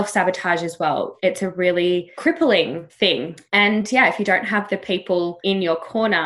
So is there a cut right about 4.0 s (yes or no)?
no